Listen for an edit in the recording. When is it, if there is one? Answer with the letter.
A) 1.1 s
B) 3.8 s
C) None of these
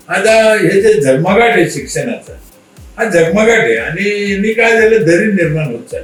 C